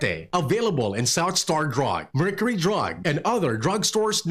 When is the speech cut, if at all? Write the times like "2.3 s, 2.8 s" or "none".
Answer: none